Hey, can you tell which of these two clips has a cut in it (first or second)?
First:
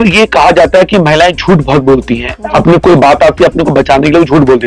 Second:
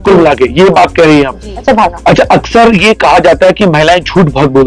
second